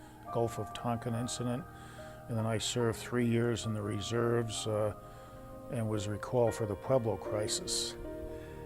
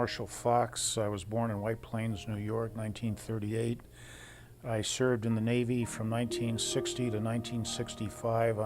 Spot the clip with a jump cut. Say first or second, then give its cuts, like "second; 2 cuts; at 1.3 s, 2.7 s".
second; 1 cut; at 1.4 s